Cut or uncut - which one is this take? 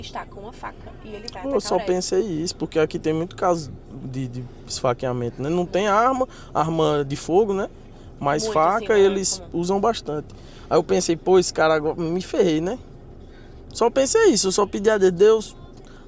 uncut